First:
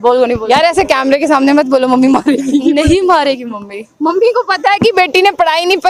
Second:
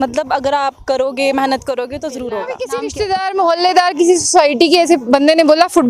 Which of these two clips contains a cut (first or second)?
second